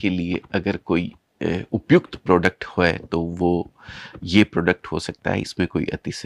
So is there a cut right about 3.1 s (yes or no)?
no